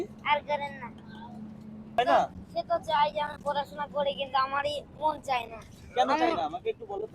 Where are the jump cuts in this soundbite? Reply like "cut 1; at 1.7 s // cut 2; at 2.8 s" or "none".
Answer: cut 1; at 2.0 s